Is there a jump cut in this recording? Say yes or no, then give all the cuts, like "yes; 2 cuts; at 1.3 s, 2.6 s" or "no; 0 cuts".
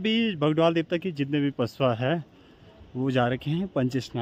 no; 0 cuts